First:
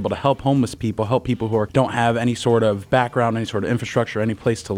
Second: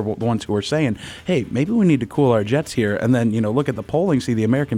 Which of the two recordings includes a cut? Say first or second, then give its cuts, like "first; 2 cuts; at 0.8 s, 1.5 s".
first; 1 cut; at 1.7 s